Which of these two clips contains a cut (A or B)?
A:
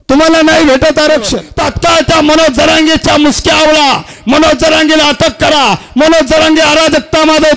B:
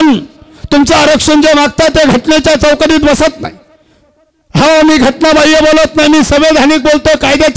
A